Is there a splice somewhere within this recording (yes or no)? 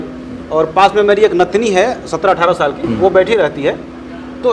no